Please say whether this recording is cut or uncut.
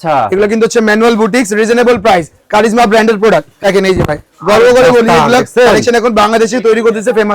cut